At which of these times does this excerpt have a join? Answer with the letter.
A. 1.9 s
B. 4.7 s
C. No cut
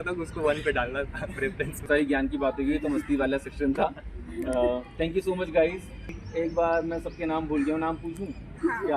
A